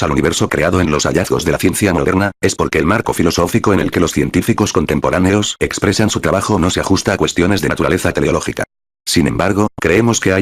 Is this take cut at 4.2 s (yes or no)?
no